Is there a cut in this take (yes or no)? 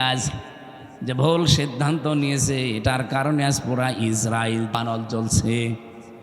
yes